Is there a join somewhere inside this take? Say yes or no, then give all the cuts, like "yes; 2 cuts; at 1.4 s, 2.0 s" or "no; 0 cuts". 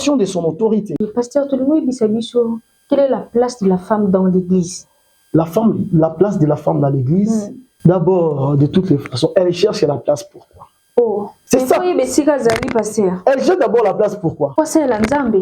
yes; 4 cuts; at 0.9 s, 7.6 s, 11.4 s, 14.5 s